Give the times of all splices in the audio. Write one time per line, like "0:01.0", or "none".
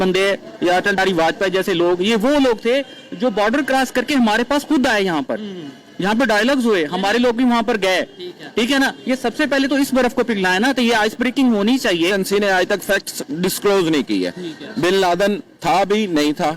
0:01.0
0:12.1